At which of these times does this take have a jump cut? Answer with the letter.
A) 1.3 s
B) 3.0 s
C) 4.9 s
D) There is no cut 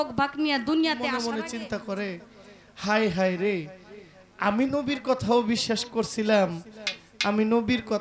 A